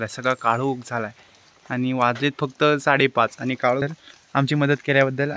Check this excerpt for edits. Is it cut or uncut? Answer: cut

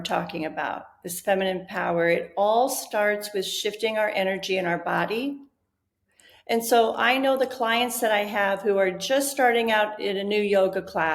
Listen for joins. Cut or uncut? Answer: uncut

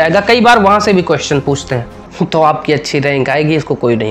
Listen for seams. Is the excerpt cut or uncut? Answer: cut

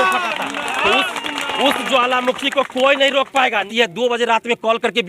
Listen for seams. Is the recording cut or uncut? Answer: cut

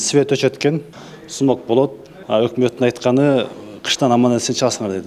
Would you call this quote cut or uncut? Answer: cut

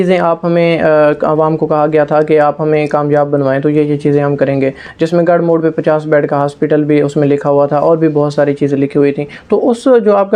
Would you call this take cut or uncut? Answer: uncut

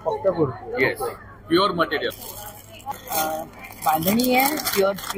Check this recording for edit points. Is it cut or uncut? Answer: cut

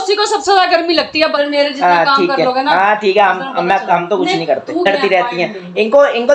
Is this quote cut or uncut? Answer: cut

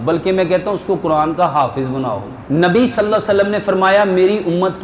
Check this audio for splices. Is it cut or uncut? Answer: cut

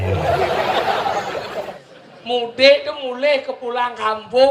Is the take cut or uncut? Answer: cut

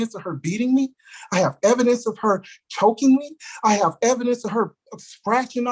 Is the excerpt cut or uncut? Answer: uncut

